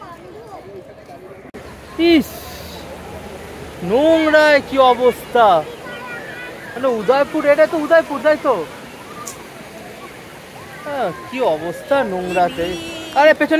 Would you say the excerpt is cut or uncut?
cut